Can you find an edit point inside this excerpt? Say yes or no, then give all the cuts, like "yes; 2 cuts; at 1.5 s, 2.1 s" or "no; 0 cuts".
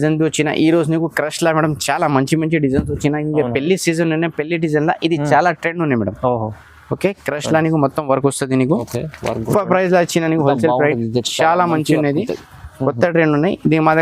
yes; 1 cut; at 9.5 s